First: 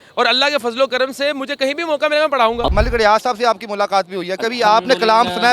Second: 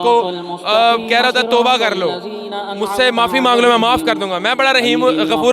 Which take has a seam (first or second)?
first